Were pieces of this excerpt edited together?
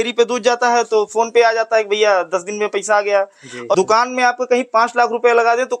yes; 1 cut; at 3.8 s

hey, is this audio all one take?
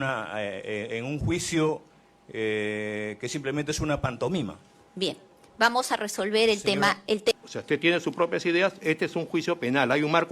no; 1 cut; at 7.3 s

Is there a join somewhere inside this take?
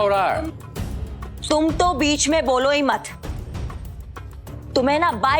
yes; 1 cut; at 1.3 s

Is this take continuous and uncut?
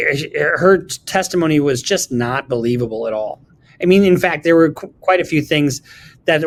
yes; 0 cuts

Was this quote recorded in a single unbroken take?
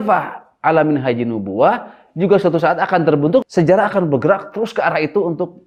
yes; 0 cuts

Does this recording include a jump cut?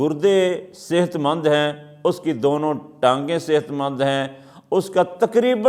no; 0 cuts

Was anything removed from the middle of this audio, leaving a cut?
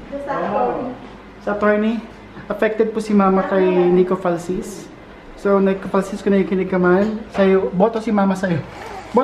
no; 0 cuts

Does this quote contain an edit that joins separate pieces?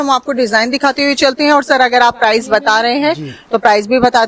no; 0 cuts

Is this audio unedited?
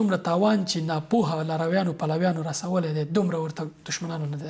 yes; 0 cuts

